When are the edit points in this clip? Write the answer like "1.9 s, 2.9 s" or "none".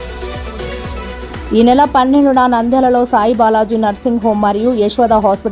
1.2 s